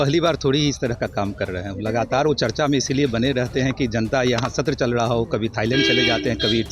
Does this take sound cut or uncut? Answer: uncut